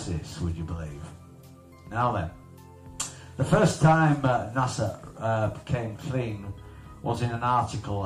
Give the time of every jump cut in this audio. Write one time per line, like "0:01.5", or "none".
none